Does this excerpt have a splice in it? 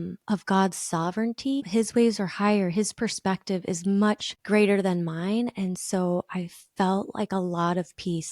yes; 1 cut; at 1.7 s

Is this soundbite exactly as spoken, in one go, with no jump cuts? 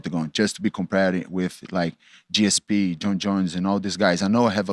yes; 0 cuts

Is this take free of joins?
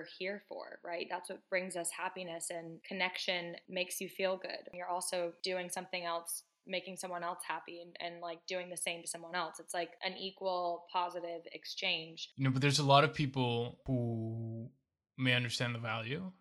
no; 3 cuts; at 3.6 s, 4.7 s, 12.2 s

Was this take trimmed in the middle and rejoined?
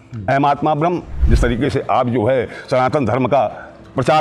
yes; 1 cut; at 1.2 s

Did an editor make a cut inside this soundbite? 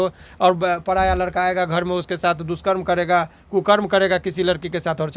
no; 0 cuts

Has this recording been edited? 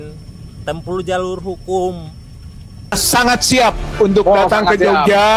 yes; 1 cut; at 3.0 s

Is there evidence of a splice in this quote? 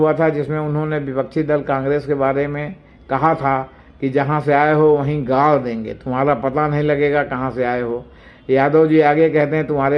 no; 0 cuts

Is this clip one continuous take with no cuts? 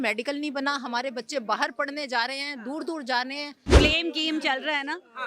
no; 1 cut; at 3.7 s

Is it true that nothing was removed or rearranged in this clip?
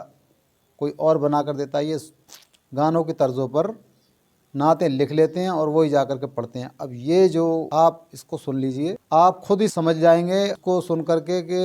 no; 4 cuts; at 7.7 s, 9.0 s, 9.7 s, 10.6 s

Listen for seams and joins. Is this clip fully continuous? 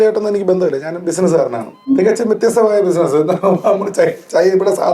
no; 1 cut; at 1.7 s

